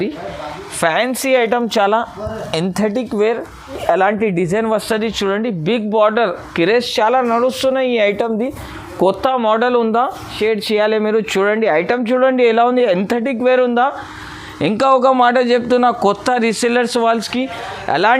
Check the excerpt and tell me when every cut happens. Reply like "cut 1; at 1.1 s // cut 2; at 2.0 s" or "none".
cut 1; at 3.7 s // cut 2; at 10.3 s